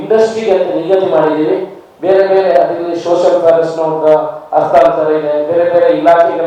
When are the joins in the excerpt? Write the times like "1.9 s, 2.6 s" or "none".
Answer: none